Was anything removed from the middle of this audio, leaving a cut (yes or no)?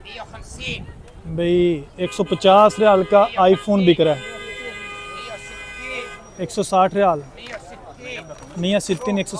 no